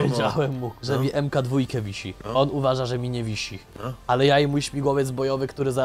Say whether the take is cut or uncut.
uncut